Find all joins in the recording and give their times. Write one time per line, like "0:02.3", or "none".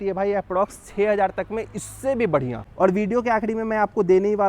0:02.8